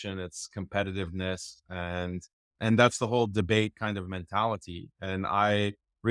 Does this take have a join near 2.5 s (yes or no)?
yes